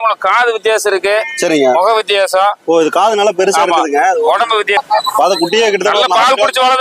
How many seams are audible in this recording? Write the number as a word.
one